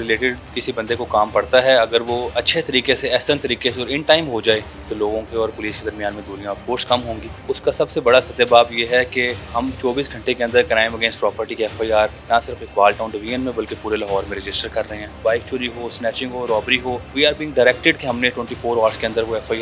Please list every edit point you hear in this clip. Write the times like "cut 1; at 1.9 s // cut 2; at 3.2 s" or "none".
cut 1; at 4.8 s // cut 2; at 7.3 s // cut 3; at 9.5 s // cut 4; at 12.2 s // cut 5; at 15.2 s // cut 6; at 17.1 s